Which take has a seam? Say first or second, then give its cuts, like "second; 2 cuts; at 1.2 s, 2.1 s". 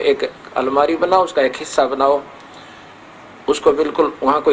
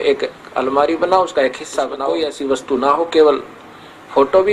second; 1 cut; at 2.0 s